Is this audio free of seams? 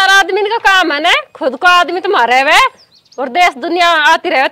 yes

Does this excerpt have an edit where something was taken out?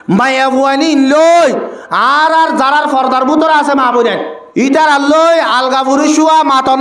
yes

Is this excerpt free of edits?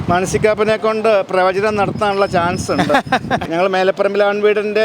no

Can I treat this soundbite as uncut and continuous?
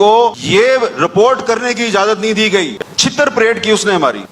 no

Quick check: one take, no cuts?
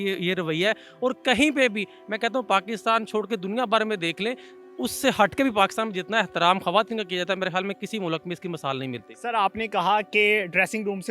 yes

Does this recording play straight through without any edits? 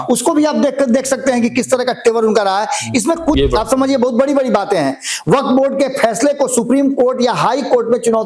no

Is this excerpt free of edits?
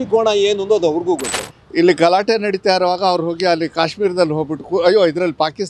no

